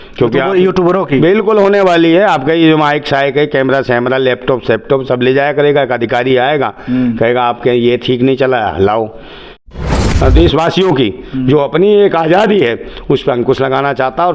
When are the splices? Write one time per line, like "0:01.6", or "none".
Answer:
0:09.8